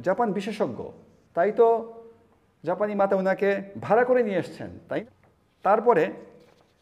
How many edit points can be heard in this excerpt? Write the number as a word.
one